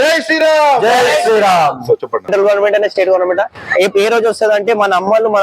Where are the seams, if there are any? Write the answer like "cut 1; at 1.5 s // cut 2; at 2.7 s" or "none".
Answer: cut 1; at 2.3 s